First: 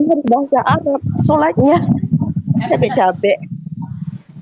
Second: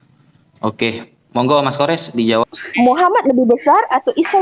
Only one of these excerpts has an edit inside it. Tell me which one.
second; 1 cut; at 2.4 s

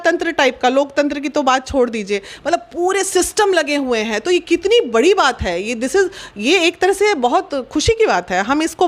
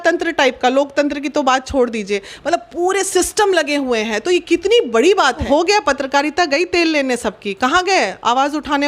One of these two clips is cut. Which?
second; 1 cut; at 5.4 s

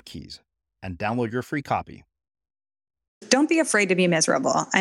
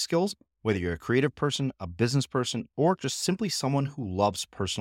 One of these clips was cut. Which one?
first; 1 cut; at 3.2 s

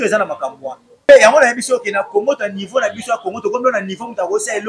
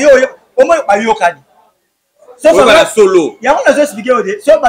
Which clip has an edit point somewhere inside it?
first; 1 cut; at 1.0 s

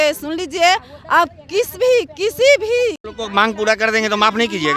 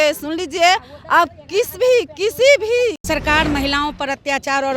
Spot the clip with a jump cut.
second; 1 cut; at 3.0 s

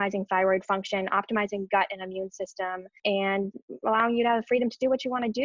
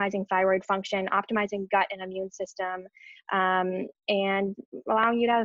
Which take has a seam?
first; 1 cut; at 2.9 s

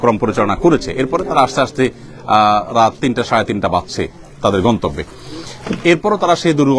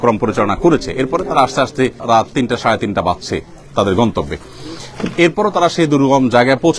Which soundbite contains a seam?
second; 1 cut; at 2.0 s

